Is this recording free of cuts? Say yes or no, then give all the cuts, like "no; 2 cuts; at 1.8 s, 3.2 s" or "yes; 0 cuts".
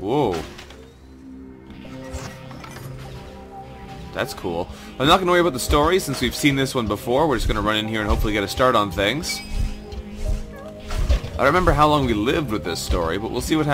yes; 0 cuts